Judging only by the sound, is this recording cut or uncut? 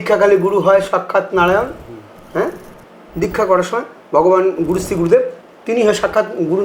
uncut